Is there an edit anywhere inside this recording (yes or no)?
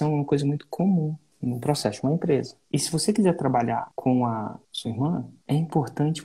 yes